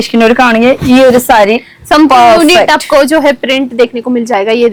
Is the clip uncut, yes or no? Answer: yes